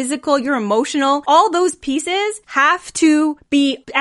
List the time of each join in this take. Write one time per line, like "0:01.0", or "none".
0:01.2
0:02.4